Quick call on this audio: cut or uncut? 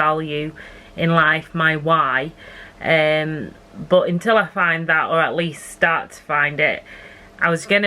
uncut